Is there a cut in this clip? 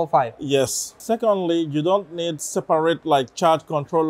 yes; 1 cut; at 1.0 s

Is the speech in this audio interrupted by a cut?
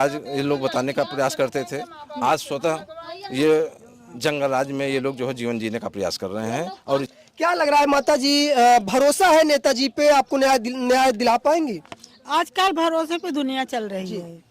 yes; 1 cut; at 7.1 s

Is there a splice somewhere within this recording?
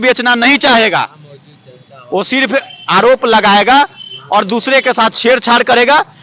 no; 0 cuts

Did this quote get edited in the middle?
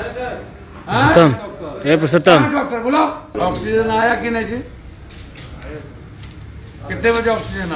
yes; 1 cut; at 3.3 s

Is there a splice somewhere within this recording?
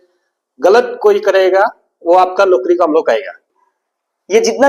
yes; 1 cut; at 3.5 s

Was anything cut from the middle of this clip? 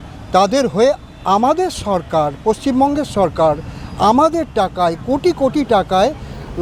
no; 0 cuts

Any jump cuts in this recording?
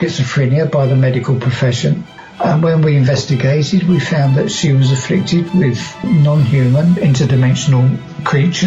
yes; 2 cuts; at 2.2 s, 6.0 s

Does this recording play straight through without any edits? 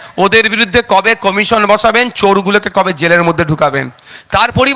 yes; 0 cuts

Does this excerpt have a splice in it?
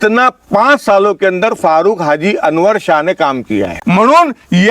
yes; 1 cut; at 3.7 s

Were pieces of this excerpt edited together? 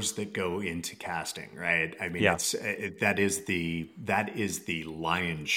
no; 0 cuts

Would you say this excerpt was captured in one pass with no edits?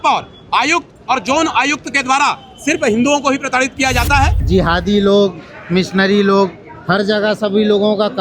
no; 1 cut; at 4.4 s

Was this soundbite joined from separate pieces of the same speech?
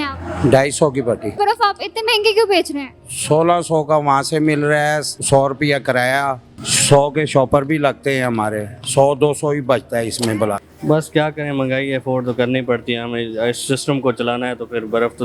yes; 2 cuts; at 1.3 s, 10.6 s

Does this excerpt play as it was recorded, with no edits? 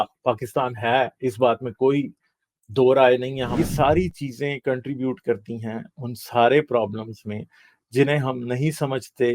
no; 1 cut; at 3.5 s

